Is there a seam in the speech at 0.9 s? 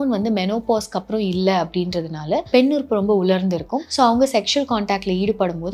no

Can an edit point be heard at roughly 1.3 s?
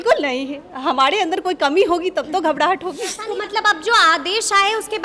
no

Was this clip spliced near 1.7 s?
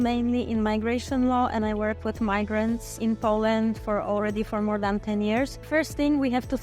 no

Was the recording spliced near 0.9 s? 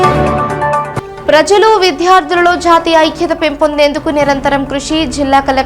yes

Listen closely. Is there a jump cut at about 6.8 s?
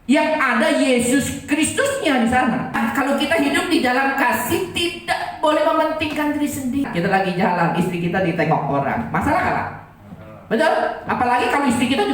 yes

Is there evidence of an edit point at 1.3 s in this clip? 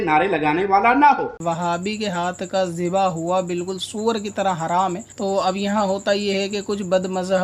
yes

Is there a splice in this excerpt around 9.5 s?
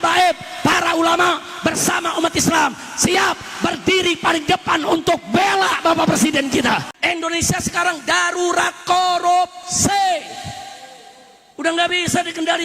no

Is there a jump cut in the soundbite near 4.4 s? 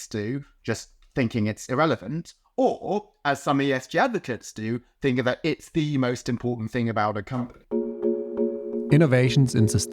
no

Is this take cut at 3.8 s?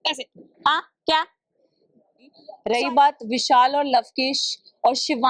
no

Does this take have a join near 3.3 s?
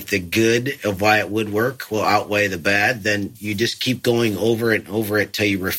yes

